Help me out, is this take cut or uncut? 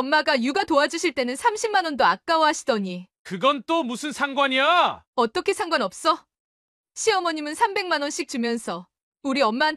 uncut